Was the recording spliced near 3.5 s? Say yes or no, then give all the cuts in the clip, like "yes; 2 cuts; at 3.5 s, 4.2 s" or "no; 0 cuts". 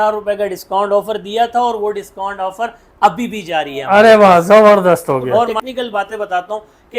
no; 1 cut; at 5.5 s